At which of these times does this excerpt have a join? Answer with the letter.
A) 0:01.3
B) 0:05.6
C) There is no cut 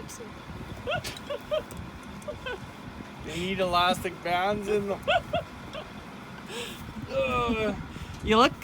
C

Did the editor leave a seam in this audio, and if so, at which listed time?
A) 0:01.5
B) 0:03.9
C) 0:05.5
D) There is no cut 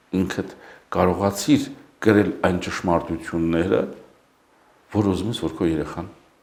D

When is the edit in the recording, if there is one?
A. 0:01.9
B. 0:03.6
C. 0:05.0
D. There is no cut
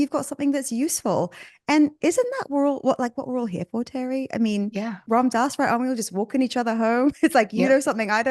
C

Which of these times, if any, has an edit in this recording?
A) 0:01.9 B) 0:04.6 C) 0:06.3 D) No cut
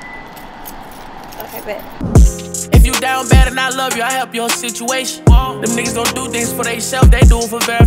A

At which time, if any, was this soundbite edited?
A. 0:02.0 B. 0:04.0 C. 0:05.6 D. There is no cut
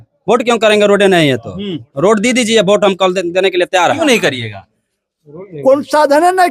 B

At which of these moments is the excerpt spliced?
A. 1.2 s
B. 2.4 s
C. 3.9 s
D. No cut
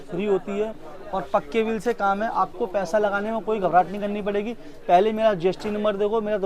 D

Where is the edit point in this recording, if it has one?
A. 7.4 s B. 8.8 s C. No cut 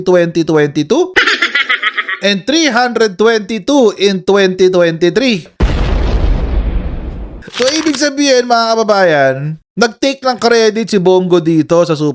C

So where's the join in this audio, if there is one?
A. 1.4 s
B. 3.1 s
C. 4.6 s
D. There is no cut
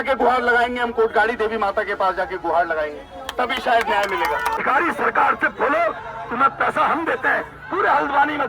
C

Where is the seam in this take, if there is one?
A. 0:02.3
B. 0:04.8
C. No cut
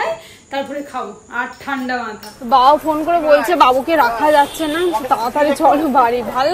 A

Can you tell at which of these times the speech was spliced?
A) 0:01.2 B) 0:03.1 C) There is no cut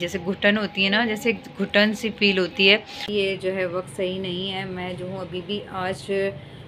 B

